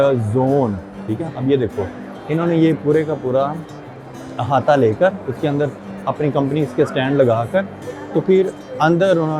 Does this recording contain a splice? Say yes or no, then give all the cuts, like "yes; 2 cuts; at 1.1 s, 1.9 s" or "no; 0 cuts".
no; 0 cuts